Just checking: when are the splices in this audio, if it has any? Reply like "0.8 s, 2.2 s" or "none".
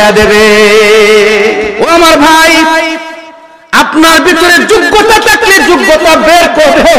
1.8 s

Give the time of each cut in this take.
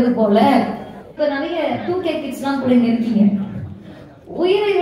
1.1 s

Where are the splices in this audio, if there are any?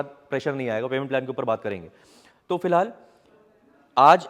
none

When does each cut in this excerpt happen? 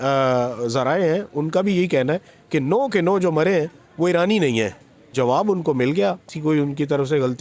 5.1 s, 6.3 s

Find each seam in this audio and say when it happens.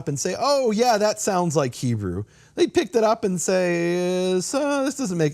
none

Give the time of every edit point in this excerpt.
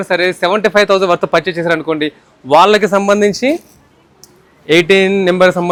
none

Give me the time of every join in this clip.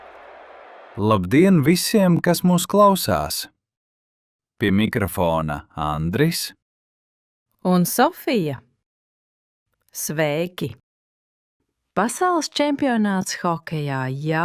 0.9 s

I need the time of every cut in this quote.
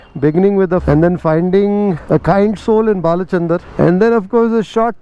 0.8 s, 2.0 s, 3.7 s

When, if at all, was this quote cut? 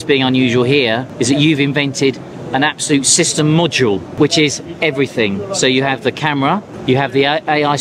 1.1 s, 4.2 s, 6.7 s

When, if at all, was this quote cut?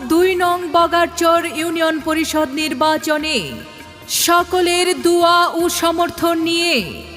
1.3 s

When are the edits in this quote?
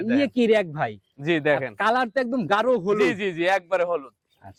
none

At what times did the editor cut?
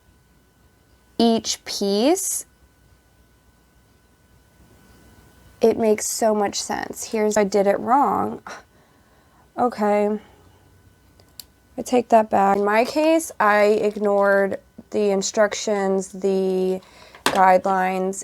7.4 s, 12.6 s

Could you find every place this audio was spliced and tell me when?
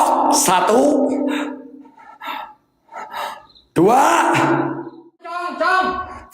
5.4 s

